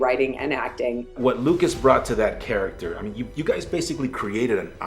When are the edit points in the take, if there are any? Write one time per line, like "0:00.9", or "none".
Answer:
0:01.1